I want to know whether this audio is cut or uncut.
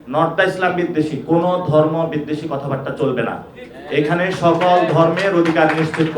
uncut